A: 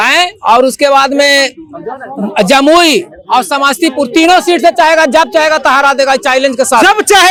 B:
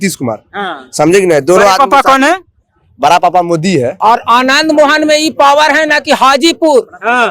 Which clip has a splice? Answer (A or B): B